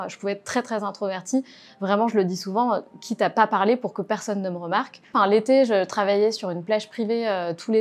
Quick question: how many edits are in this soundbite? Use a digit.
1